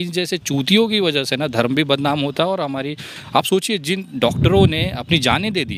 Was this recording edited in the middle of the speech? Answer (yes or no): no